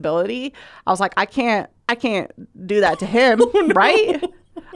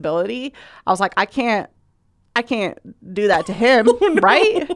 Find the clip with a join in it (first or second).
first